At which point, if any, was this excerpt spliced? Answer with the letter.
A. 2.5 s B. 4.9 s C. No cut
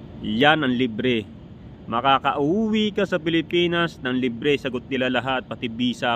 C